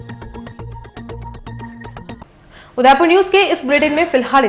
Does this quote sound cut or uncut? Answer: uncut